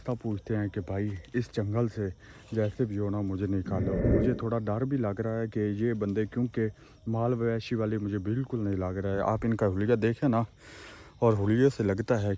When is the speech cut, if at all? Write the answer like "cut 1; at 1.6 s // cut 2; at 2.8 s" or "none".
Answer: cut 1; at 4.0 s

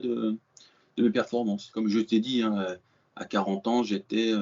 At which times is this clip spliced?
cut 1; at 1.7 s

